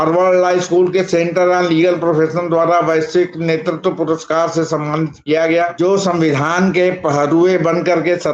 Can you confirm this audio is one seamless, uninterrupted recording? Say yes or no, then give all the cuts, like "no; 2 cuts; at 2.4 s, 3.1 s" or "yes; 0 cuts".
no; 1 cut; at 5.7 s